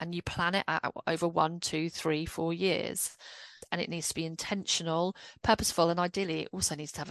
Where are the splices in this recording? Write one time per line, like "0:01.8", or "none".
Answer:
none

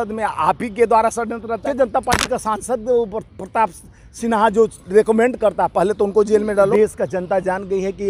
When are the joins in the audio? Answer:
0:01.8
0:06.7

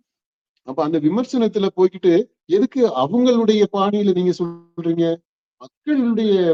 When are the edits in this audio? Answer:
none

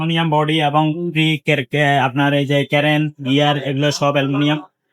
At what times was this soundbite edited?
none

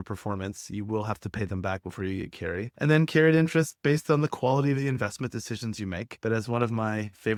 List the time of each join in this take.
none

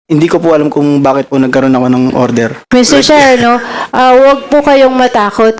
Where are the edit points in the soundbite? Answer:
0:02.6

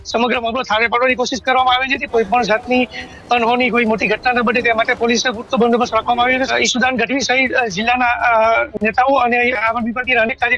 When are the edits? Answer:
0:02.0
0:06.5

